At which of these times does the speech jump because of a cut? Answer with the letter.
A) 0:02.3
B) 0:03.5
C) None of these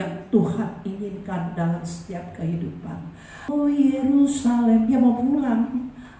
B